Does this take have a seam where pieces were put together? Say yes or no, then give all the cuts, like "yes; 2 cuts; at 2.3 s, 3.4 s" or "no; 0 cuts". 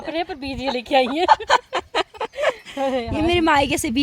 no; 0 cuts